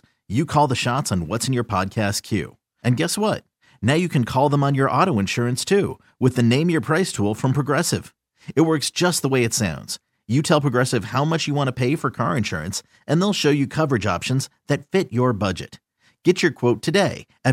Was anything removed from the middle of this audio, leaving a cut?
no; 0 cuts

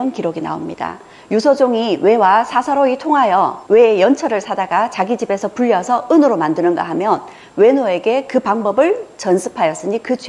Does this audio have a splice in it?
no; 0 cuts

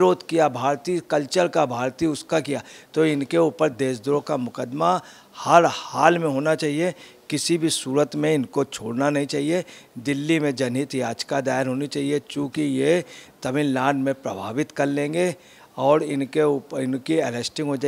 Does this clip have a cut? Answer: no; 0 cuts

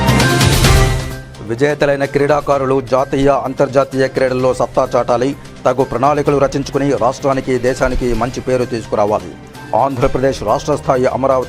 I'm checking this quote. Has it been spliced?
yes; 1 cut; at 1.0 s

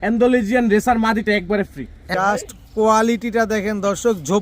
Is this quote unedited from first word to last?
no; 1 cut; at 2.0 s

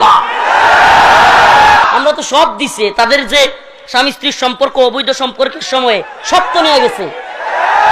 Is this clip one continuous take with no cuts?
no; 1 cut; at 1.8 s

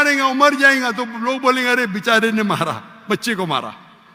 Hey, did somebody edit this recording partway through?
no; 0 cuts

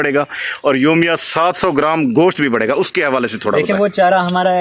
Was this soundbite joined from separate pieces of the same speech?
no; 0 cuts

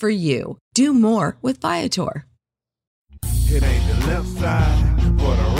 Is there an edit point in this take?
yes; 1 cut; at 3.0 s

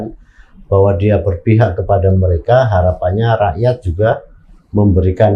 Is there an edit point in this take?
no; 0 cuts

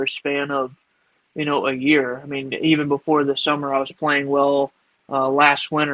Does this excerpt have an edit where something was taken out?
no; 0 cuts

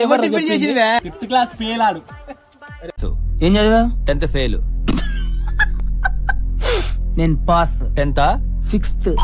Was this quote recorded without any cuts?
no; 1 cut; at 1.0 s

